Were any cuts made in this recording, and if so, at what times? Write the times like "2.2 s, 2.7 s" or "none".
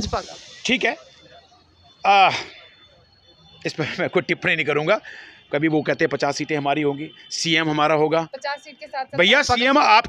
none